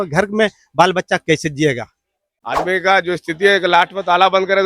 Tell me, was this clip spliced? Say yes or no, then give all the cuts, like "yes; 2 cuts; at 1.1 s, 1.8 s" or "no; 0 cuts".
yes; 1 cut; at 2.0 s